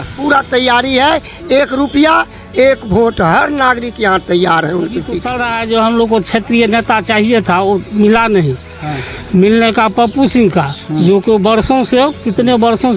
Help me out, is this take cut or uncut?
cut